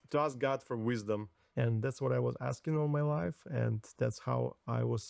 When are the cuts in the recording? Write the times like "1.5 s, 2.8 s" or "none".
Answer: 1.4 s